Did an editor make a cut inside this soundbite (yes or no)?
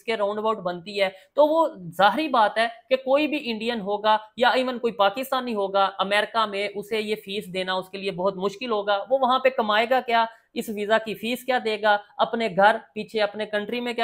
no